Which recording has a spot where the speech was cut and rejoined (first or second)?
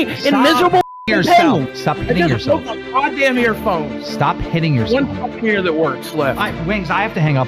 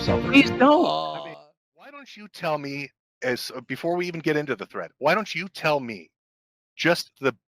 second